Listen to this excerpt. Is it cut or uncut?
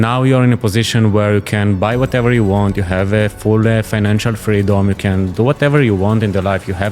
uncut